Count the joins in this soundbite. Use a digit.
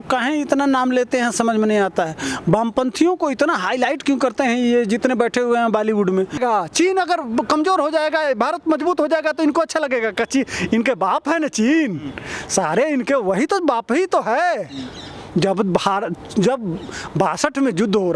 1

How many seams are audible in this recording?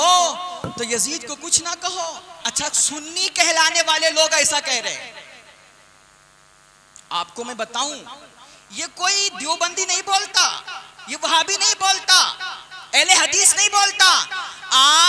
1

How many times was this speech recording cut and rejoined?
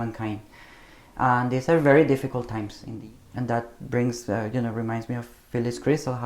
1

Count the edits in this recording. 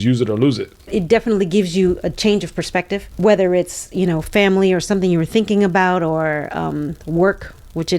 2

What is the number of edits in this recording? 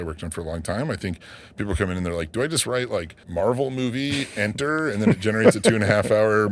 1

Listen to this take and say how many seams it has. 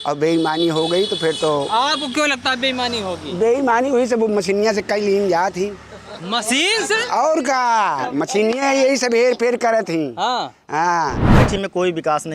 1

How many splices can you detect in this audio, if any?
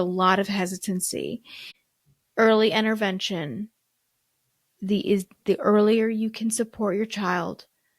1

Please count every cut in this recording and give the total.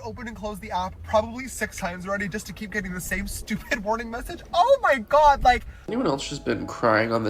1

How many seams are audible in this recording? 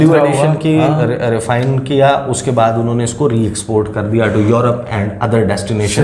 0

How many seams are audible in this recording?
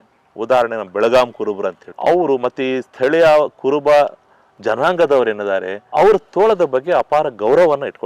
2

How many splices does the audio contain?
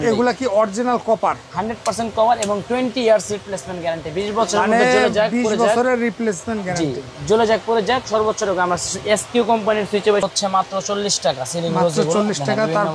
1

